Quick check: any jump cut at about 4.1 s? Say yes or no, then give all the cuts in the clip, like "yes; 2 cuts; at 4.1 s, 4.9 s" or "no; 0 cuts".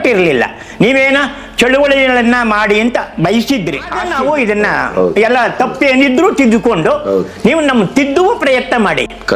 yes; 1 cut; at 4.1 s